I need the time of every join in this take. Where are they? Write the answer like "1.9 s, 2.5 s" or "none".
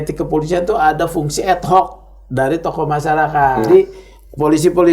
3.7 s

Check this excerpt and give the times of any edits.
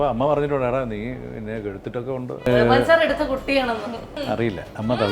2.4 s, 4.3 s

